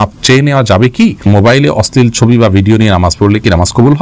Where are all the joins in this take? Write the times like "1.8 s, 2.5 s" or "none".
1.2 s